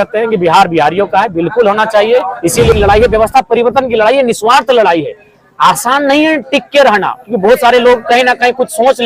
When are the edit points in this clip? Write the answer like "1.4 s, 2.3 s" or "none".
2.7 s